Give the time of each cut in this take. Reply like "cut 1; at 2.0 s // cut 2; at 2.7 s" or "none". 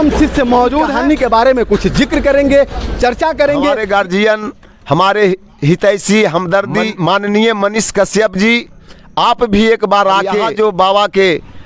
cut 1; at 0.9 s // cut 2; at 3.8 s // cut 3; at 6.9 s // cut 4; at 10.4 s